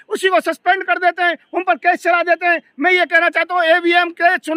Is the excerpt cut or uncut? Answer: uncut